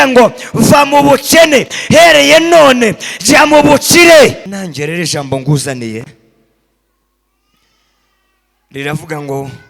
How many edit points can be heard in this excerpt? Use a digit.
1